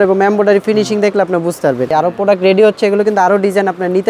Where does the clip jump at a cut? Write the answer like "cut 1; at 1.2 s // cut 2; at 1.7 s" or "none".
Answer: cut 1; at 1.9 s

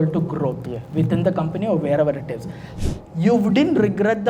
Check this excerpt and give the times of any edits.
cut 1; at 2.7 s

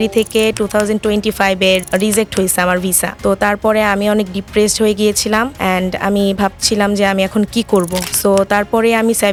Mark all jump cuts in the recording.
none

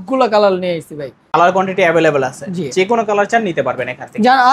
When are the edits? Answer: cut 1; at 1.2 s

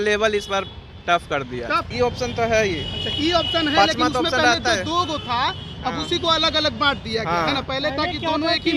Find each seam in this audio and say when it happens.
cut 1; at 1.9 s

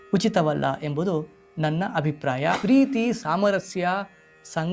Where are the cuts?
cut 1; at 2.6 s

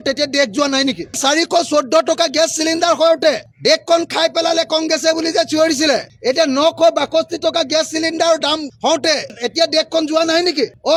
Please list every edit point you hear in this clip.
none

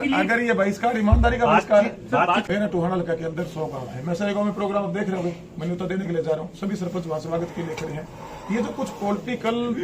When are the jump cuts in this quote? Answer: cut 1; at 2.5 s

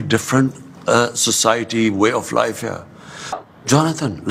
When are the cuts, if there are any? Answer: cut 1; at 3.4 s

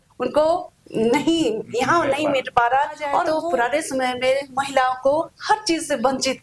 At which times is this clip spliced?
cut 1; at 3.3 s

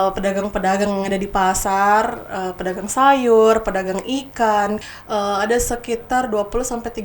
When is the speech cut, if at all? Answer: cut 1; at 4.9 s

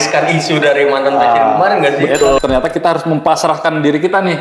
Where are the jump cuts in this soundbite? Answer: cut 1; at 2.4 s

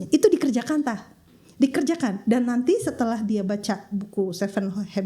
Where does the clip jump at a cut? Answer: none

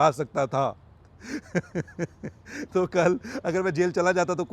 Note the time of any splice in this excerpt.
none

